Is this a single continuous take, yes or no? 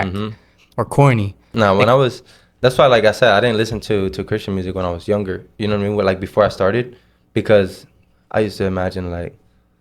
no